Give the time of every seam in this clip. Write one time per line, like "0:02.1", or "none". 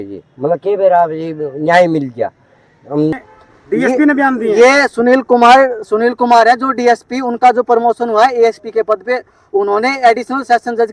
0:03.1